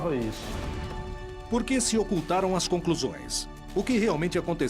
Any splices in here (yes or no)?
yes